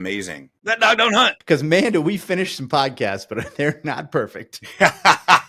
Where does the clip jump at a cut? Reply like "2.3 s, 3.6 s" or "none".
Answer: 1.0 s